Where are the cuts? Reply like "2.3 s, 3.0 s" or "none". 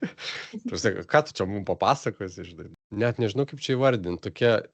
2.7 s